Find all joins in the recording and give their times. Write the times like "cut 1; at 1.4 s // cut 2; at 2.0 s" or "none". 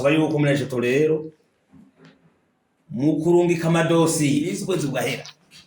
cut 1; at 4.5 s